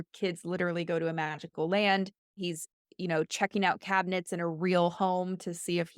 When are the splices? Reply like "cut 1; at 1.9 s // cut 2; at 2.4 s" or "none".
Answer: cut 1; at 2.4 s